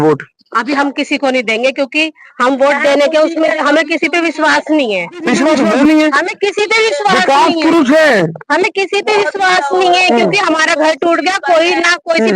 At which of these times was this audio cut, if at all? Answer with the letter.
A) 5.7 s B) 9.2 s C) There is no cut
A